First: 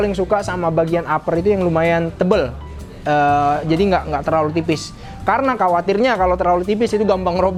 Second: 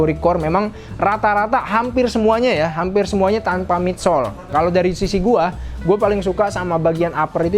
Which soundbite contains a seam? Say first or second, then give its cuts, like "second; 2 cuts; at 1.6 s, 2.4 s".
second; 1 cut; at 4.5 s